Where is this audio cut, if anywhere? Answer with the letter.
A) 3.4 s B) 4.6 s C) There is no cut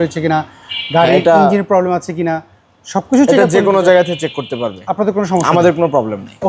C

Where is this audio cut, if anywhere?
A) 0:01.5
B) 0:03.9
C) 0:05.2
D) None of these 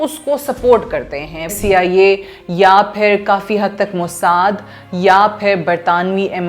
A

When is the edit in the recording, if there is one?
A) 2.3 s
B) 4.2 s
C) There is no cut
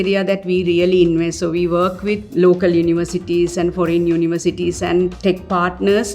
A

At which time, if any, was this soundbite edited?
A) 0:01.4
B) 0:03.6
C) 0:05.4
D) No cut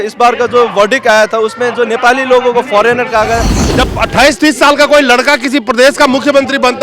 B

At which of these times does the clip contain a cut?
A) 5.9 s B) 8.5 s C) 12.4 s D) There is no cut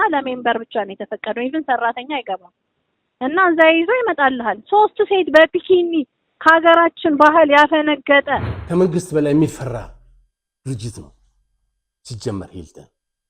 B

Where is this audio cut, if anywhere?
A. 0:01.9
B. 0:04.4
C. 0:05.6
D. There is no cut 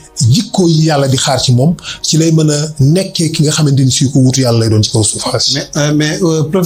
D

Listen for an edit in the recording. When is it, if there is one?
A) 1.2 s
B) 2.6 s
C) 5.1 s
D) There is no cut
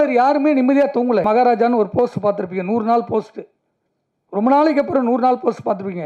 A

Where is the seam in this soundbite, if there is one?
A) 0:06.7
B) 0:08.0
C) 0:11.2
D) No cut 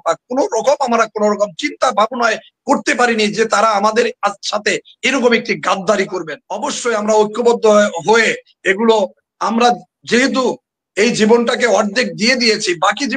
A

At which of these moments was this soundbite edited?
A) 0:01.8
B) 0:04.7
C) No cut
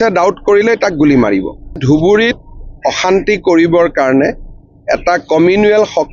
A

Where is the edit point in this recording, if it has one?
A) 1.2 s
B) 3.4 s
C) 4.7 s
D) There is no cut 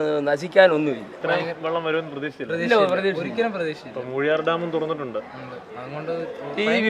A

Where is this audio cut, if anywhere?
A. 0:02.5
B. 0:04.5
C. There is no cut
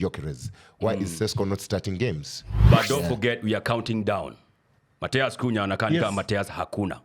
A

